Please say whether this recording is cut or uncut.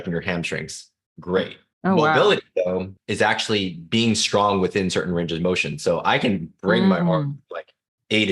cut